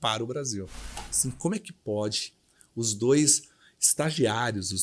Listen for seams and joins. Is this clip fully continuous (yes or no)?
no